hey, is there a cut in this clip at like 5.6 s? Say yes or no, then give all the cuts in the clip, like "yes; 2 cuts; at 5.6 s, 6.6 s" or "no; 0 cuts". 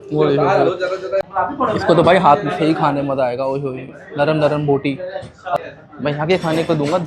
yes; 2 cuts; at 1.2 s, 5.6 s